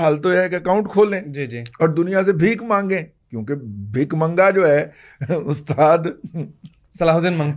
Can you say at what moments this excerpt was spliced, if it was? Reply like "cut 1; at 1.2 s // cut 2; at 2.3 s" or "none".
none